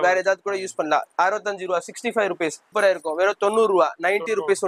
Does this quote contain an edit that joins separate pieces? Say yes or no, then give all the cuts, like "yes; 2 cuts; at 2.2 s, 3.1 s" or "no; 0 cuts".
yes; 1 cut; at 2.6 s